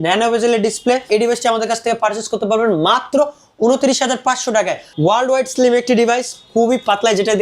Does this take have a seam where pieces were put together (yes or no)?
yes